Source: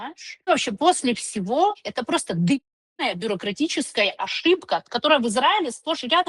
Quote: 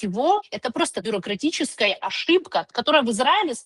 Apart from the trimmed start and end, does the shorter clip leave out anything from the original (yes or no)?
yes